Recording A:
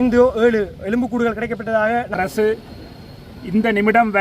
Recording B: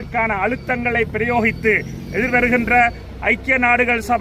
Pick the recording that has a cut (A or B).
A